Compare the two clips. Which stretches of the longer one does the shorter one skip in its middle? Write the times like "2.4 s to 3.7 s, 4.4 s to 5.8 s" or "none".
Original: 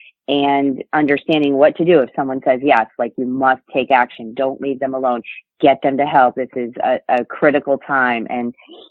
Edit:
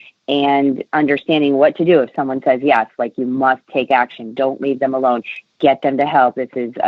none